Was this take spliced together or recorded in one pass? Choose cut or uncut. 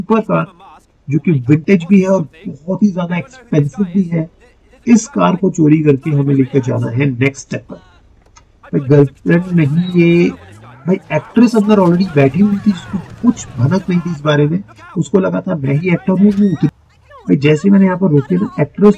cut